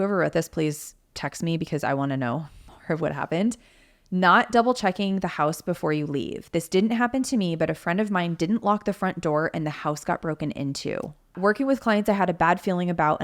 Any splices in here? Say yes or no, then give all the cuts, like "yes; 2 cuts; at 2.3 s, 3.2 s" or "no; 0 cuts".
yes; 1 cut; at 11.4 s